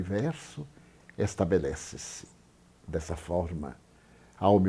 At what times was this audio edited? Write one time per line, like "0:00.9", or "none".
none